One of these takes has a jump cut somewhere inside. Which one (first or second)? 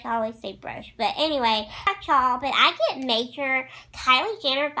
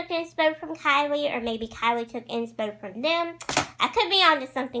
first